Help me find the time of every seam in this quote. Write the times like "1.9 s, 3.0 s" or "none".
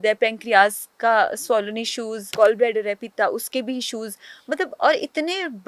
2.2 s